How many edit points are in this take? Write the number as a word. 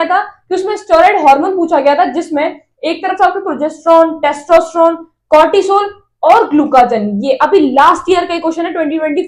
zero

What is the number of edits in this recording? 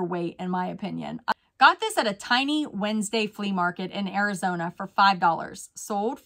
one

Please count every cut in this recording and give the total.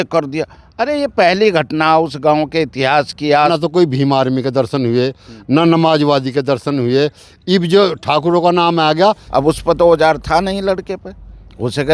two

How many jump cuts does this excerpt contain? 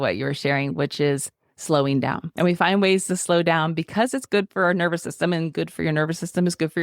one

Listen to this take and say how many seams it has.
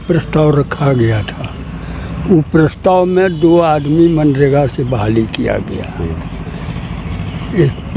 zero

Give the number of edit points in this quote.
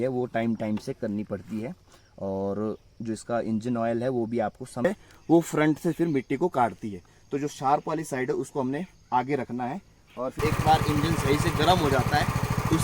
two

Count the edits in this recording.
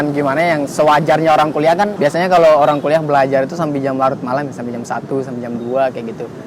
one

